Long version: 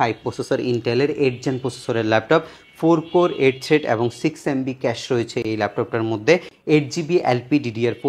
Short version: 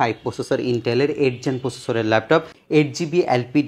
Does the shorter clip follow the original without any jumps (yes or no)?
no